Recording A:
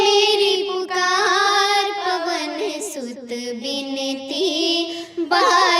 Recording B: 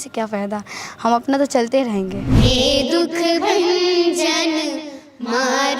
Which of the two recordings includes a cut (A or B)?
B